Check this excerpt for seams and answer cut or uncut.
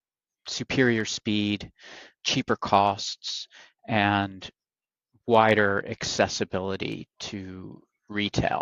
cut